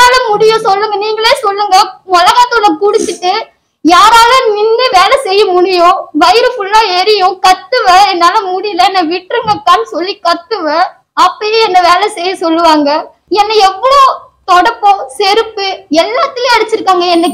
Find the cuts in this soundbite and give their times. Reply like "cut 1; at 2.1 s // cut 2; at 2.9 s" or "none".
cut 1; at 11.0 s // cut 2; at 13.1 s